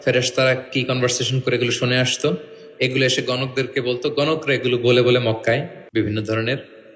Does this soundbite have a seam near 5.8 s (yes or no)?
yes